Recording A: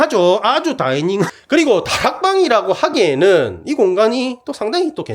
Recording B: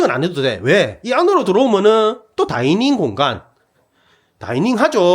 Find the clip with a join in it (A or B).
A